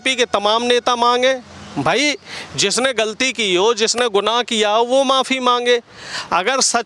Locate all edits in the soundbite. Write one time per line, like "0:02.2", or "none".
none